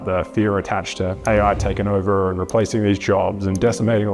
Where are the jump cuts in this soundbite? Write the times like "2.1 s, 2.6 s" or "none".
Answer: 1.2 s

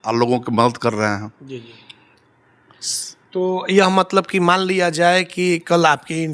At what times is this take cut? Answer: none

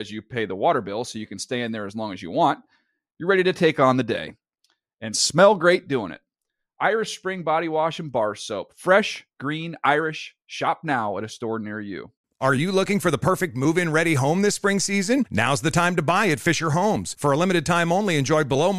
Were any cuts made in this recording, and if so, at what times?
12.2 s

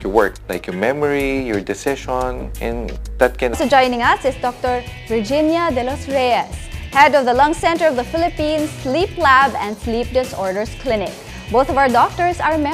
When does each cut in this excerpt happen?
none

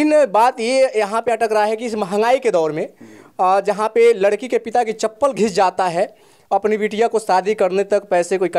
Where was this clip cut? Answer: none

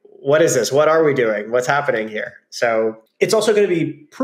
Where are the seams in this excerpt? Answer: 3.0 s

